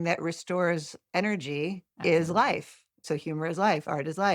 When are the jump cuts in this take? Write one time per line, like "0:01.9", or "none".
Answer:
0:01.9
0:03.0

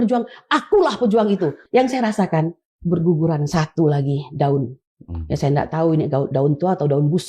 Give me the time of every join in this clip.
0:01.6

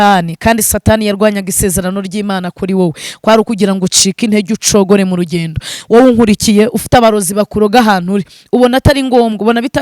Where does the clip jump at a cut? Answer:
0:05.7

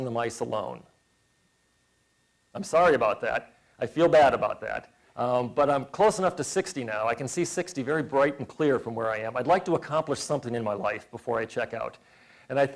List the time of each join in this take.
0:05.7

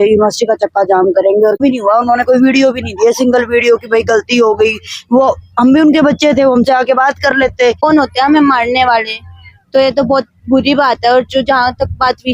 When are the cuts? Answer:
0:01.6
0:07.8

